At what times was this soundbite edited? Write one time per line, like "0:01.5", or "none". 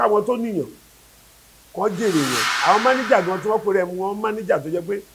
0:02.4